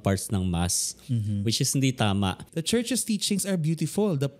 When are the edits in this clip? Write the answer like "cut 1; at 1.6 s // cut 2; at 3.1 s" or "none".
cut 1; at 2.5 s